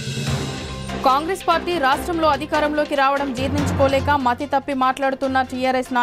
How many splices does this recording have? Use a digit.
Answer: 1